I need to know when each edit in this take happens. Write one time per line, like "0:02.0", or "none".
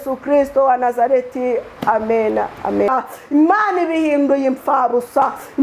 0:02.9